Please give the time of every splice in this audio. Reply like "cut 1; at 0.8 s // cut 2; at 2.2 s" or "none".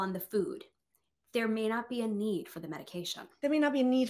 cut 1; at 3.2 s